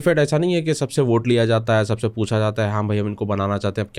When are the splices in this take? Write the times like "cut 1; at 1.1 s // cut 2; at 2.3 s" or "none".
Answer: none